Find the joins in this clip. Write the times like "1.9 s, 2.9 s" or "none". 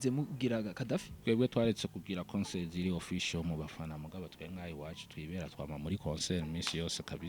1.1 s